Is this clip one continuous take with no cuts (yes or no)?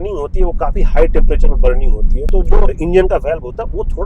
no